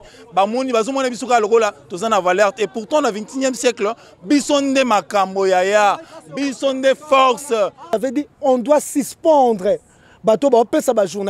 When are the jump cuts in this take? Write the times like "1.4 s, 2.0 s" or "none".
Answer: 7.9 s